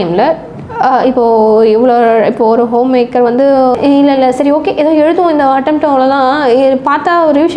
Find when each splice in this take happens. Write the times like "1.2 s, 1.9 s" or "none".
3.7 s